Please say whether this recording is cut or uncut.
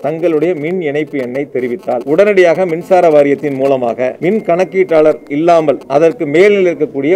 cut